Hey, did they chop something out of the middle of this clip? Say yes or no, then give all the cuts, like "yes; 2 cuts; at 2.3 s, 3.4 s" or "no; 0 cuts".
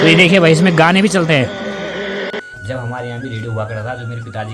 yes; 1 cut; at 2.3 s